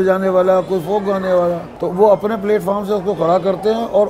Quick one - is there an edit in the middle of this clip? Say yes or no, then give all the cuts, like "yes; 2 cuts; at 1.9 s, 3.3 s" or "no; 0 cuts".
yes; 1 cut; at 1.7 s